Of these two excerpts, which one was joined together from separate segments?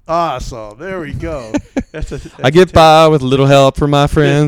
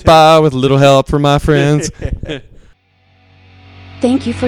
second; 1 cut; at 3.3 s

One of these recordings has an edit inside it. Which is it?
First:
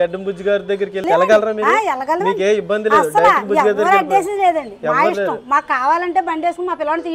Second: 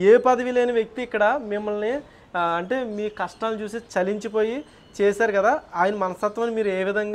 first; 1 cut; at 1.0 s

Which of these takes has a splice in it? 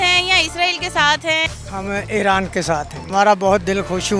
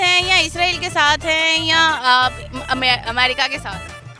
first; 2 cuts; at 1.5 s, 3.0 s

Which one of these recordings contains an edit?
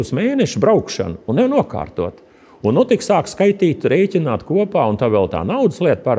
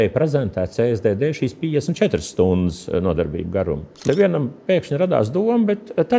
second; 1 cut; at 4.0 s

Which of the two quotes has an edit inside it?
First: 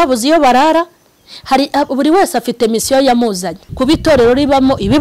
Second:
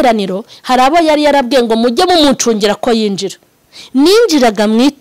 first; 1 cut; at 3.6 s

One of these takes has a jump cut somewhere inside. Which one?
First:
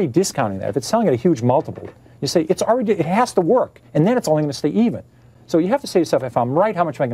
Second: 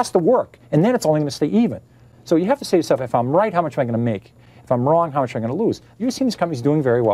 second; 1 cut; at 5.9 s

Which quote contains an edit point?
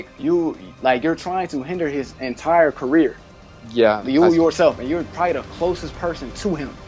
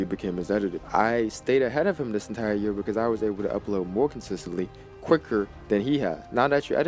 second; 2 cuts; at 0.8 s, 5.9 s

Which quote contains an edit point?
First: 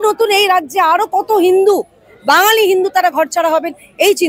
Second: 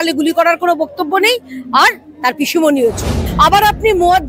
second; 1 cut; at 3.2 s

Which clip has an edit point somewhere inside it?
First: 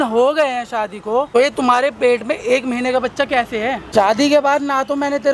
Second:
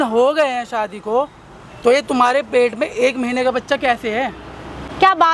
first; 2 cuts; at 1.3 s, 3.8 s

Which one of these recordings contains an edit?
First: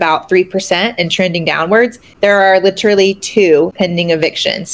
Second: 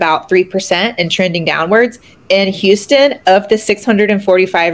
first; 2 cuts; at 2.0 s, 3.7 s

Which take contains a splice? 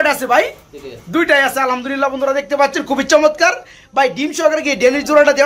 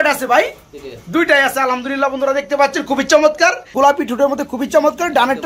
second; 1 cut; at 3.7 s

